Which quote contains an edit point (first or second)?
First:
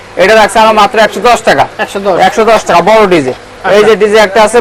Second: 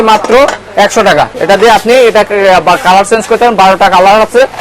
second